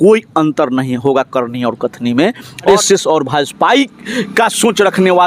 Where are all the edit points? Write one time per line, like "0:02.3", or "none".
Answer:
0:02.7